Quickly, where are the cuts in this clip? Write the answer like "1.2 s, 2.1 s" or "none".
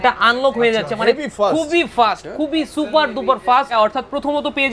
3.7 s